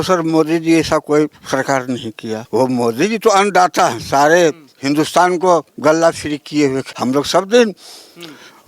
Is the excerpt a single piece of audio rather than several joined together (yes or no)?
no